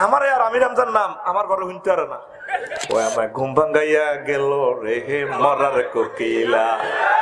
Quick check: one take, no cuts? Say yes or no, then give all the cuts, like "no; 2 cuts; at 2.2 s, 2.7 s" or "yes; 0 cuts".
no; 1 cut; at 2.8 s